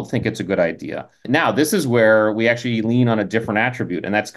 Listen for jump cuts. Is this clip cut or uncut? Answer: cut